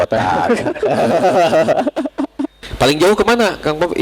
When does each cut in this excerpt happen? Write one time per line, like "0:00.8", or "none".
0:02.6